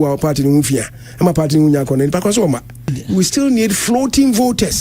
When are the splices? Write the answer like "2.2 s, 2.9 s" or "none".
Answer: 3.0 s